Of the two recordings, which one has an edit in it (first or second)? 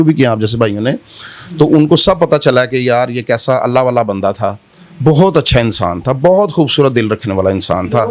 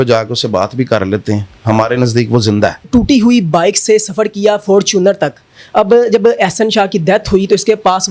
second